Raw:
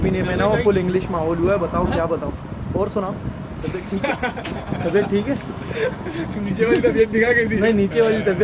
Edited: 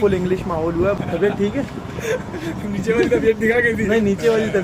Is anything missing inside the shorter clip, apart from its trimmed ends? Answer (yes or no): yes